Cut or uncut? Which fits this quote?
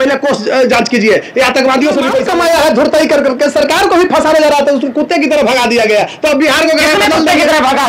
cut